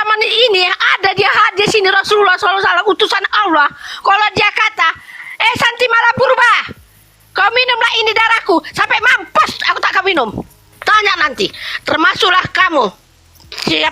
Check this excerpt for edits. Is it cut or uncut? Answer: cut